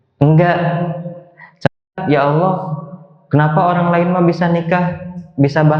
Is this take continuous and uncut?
no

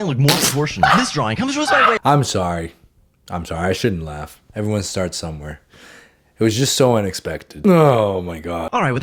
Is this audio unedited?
yes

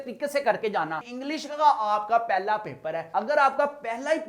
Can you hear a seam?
yes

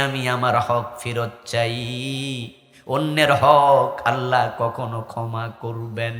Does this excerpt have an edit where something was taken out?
no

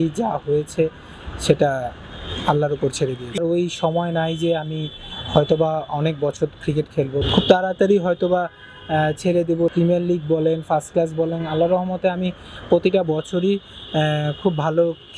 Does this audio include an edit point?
yes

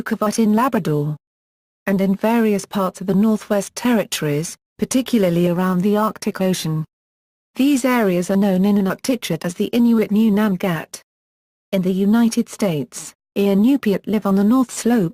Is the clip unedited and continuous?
yes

